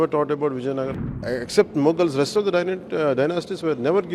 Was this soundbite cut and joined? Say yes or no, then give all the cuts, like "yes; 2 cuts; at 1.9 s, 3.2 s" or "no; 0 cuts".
yes; 1 cut; at 1.1 s